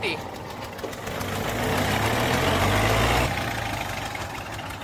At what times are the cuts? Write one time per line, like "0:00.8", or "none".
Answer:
0:03.3

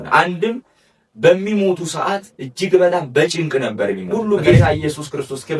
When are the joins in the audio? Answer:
0:04.4

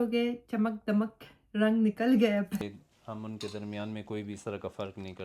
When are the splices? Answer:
0:02.5

